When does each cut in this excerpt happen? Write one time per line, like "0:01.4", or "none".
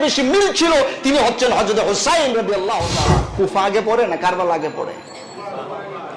0:03.3